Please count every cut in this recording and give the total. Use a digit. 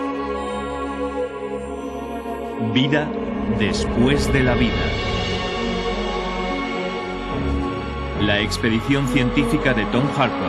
0